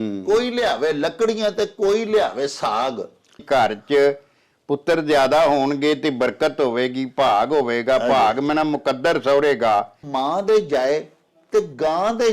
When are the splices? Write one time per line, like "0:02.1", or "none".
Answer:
0:03.4
0:10.0